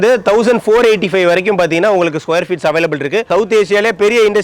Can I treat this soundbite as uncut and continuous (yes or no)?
no